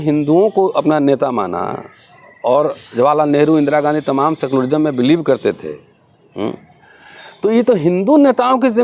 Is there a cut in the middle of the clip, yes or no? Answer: no